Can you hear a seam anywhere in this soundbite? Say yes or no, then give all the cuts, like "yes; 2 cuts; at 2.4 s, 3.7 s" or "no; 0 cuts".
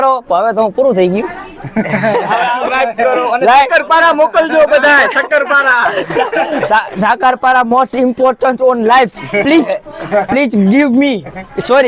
yes; 3 cuts; at 1.4 s, 2.6 s, 6.2 s